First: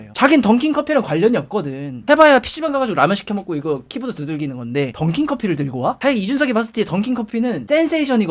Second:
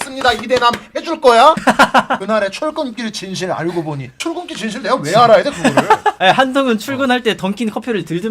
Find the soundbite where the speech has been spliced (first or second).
second